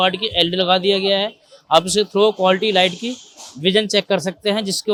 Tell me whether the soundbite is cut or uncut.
uncut